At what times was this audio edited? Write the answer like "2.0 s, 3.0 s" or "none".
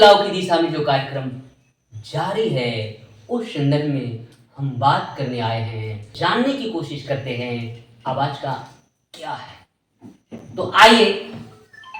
6.1 s

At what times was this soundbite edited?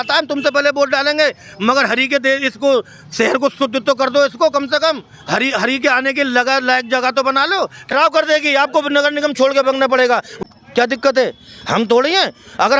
7.9 s, 10.4 s

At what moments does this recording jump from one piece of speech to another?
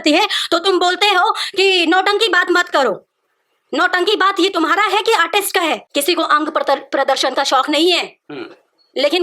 5.9 s

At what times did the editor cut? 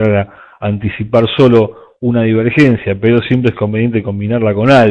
none

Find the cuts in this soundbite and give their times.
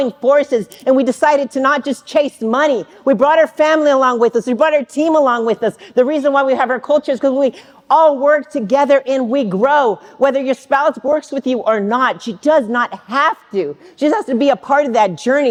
none

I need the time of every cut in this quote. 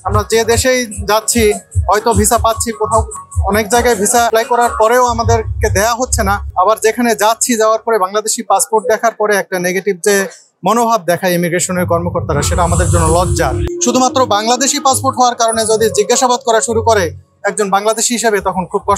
4.3 s, 6.5 s, 13.7 s

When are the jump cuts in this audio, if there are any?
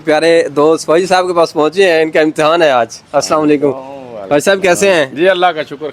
none

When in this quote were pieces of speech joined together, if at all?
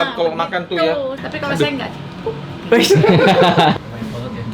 3.5 s

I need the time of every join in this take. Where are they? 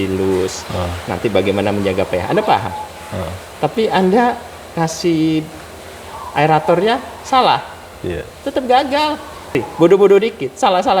9.6 s

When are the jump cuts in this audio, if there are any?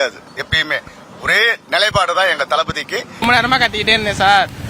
3.2 s

